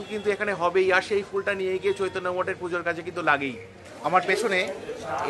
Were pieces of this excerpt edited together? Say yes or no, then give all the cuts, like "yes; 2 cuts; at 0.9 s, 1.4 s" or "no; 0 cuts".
yes; 1 cut; at 3.7 s